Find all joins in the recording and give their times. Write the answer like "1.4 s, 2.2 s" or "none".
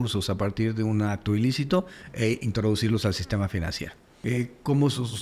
none